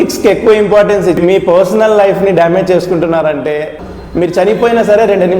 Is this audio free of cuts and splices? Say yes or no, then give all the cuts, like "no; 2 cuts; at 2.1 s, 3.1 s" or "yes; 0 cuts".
no; 2 cuts; at 1.2 s, 3.7 s